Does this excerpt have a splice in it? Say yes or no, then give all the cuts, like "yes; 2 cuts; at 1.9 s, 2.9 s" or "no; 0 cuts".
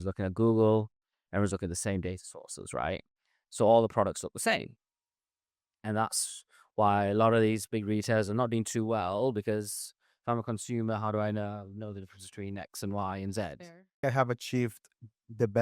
yes; 1 cut; at 14.0 s